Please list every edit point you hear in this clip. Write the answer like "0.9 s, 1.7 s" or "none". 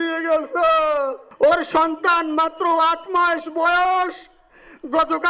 1.2 s

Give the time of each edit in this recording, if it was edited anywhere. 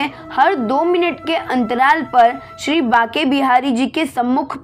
none

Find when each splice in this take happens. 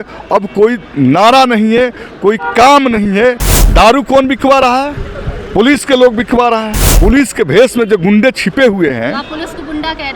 3.5 s, 6.8 s

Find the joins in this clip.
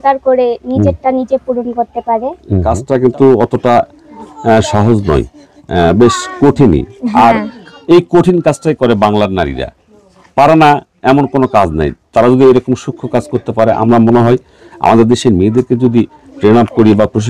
2.5 s

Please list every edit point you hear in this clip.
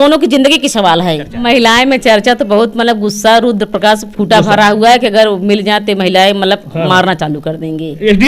1.4 s

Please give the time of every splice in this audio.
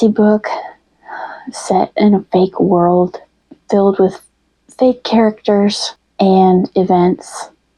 none

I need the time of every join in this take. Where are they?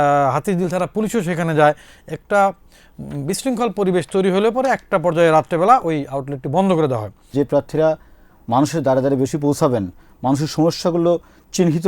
7.3 s

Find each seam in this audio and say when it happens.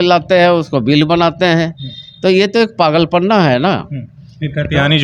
none

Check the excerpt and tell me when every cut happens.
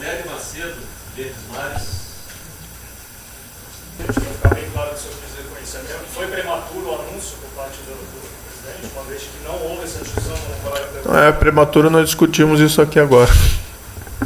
4.0 s

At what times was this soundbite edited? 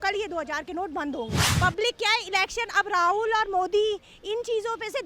1.4 s

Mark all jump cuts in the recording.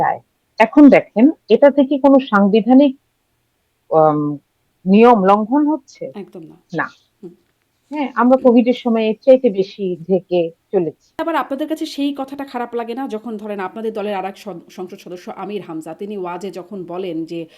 11.2 s

